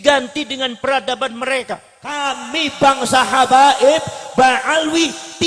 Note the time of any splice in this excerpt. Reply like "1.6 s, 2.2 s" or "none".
2.3 s